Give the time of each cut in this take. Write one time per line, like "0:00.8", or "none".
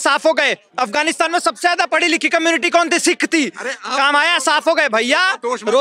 none